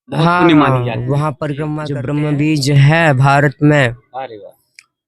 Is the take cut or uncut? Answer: cut